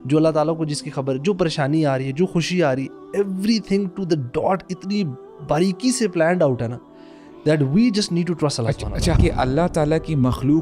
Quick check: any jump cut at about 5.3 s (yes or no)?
no